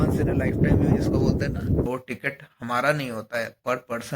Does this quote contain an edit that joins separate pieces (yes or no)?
yes